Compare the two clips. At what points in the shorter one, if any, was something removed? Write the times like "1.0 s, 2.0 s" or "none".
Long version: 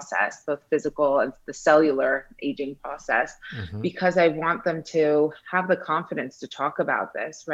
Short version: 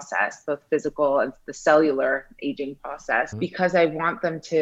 3.3 s